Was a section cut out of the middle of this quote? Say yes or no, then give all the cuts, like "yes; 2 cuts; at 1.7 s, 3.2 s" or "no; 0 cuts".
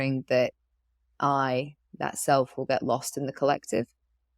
no; 0 cuts